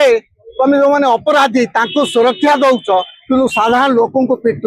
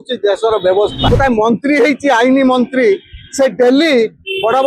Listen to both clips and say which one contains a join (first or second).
second